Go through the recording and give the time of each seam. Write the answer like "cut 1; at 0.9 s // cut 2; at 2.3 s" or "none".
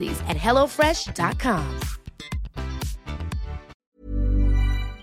cut 1; at 3.7 s